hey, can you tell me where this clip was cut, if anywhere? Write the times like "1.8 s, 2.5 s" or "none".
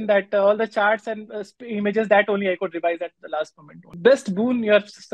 3.9 s